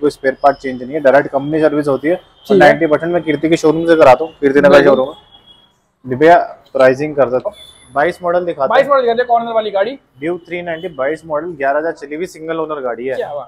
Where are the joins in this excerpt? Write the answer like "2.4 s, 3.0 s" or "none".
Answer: 7.5 s